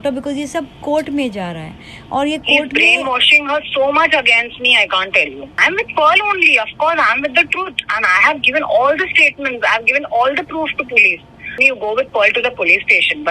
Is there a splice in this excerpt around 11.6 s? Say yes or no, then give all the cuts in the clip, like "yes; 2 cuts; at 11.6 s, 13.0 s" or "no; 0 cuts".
yes; 2 cuts; at 5.6 s, 11.6 s